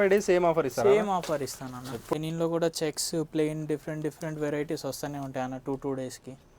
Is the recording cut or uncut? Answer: cut